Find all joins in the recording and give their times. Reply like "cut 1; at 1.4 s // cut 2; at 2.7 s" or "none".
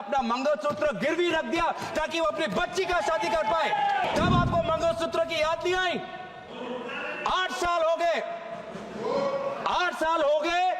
cut 1; at 4.0 s